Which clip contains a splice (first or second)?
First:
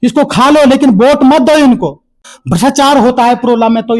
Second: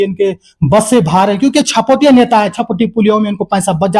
first